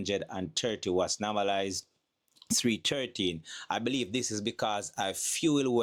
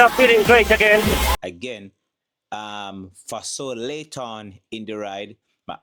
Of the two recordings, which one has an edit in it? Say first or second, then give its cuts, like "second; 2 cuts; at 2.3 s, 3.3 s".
second; 1 cut; at 1.3 s